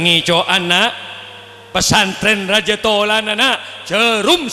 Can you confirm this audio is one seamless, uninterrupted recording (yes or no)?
yes